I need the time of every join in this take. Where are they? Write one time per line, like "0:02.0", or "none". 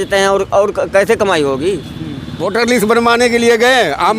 0:02.4